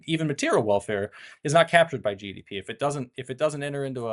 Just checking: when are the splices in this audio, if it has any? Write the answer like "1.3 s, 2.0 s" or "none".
none